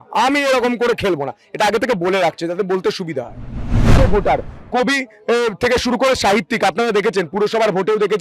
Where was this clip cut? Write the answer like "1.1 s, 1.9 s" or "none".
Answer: 4.0 s